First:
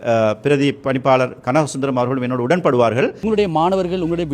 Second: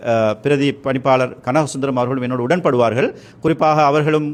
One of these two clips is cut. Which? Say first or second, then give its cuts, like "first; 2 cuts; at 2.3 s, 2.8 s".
first; 1 cut; at 3.2 s